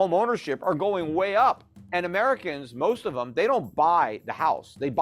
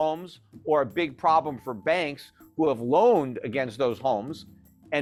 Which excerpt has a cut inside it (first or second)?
first